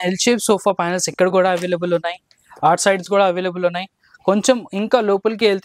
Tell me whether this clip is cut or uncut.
uncut